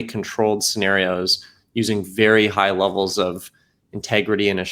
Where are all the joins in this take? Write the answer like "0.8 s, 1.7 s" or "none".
none